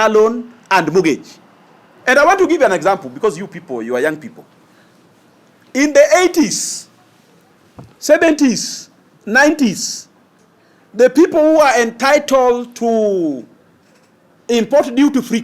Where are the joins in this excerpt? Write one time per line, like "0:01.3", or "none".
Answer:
none